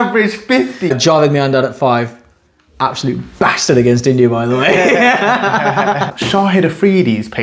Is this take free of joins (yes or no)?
no